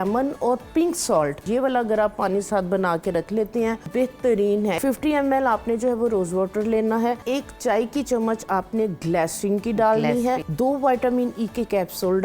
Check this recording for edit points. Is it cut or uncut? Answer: cut